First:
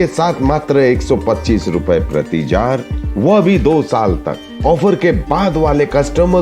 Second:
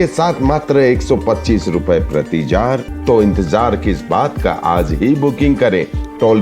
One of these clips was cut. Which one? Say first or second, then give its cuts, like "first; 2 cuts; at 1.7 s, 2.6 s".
second; 1 cut; at 2.9 s